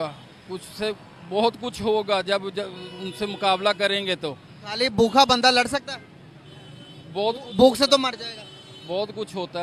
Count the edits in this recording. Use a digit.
0